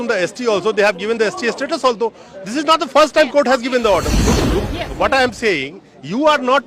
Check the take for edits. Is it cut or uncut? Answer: cut